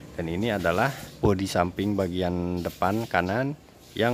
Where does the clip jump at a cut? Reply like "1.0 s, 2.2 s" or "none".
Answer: 1.1 s